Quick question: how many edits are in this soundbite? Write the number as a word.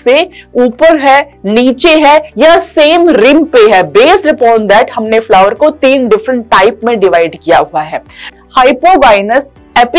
one